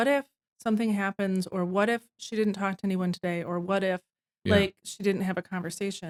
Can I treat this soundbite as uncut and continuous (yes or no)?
yes